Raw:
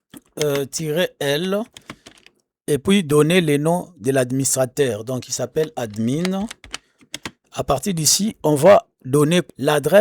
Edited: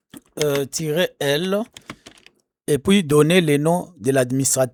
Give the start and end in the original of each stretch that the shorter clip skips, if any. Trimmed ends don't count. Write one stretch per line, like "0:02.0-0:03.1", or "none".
none